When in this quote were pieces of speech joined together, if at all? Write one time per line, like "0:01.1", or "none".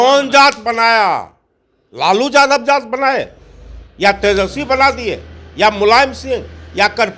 none